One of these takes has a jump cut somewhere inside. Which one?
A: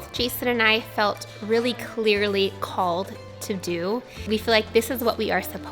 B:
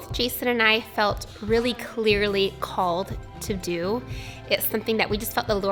A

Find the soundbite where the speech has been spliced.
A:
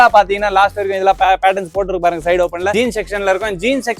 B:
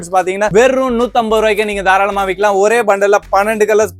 A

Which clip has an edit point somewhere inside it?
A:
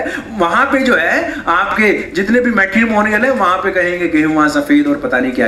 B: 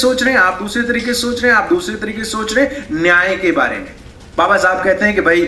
B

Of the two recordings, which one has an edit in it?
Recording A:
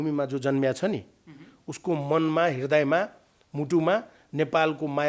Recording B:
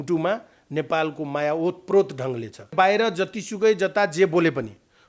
B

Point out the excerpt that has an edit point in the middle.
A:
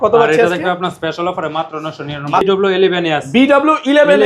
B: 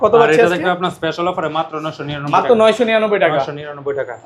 A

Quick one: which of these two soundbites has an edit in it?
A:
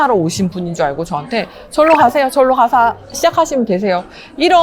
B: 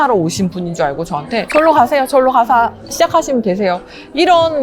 B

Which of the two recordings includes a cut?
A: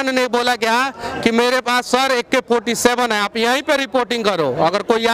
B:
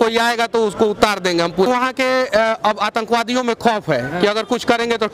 B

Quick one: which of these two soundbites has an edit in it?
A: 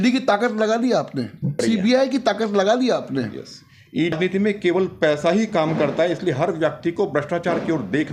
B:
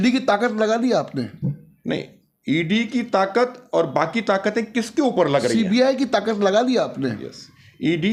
A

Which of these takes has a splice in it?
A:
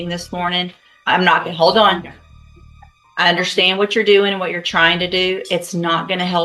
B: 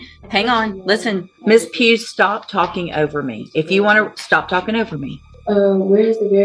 B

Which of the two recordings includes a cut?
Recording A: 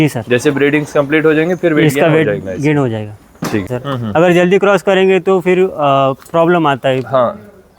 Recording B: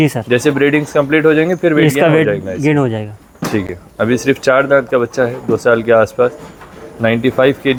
A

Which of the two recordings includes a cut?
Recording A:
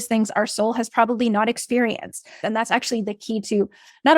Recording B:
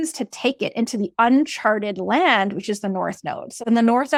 A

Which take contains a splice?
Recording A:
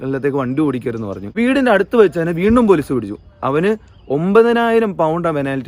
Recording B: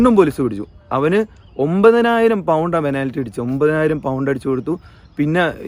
A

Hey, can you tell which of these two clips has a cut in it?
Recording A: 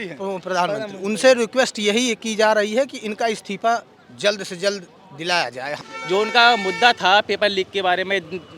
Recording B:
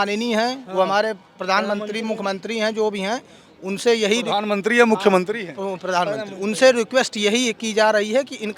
A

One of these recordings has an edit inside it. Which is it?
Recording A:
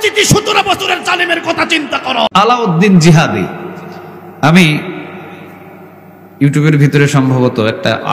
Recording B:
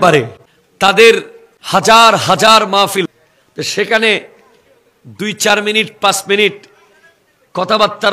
A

